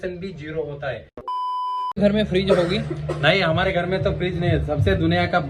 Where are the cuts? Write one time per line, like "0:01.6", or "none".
0:01.7